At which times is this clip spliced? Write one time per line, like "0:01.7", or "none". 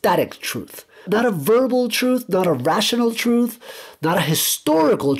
0:01.0